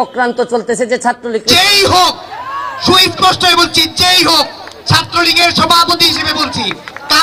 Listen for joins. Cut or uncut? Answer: cut